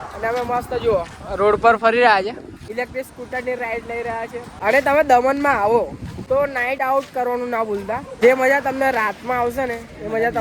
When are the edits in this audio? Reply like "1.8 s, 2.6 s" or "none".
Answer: 2.6 s, 4.5 s, 6.5 s